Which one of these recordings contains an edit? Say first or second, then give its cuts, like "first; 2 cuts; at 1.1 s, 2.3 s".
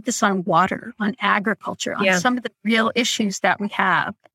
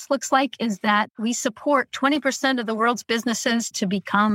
second; 1 cut; at 1.1 s